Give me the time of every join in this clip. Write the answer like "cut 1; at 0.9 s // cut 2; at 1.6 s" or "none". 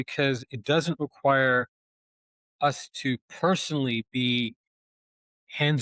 none